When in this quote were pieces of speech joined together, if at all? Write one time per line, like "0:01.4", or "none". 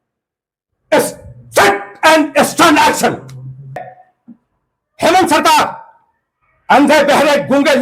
0:03.9